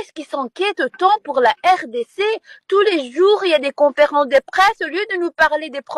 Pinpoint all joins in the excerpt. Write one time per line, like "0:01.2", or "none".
none